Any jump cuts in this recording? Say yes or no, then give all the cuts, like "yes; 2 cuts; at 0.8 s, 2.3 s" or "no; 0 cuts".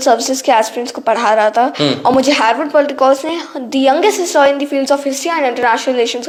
no; 0 cuts